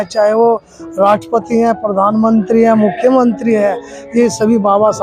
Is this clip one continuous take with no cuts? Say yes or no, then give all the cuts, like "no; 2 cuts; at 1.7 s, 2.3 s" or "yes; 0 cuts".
yes; 0 cuts